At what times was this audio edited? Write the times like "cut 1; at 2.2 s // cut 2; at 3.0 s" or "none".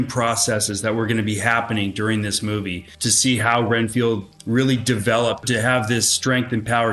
cut 1; at 2.9 s // cut 2; at 4.3 s // cut 3; at 5.4 s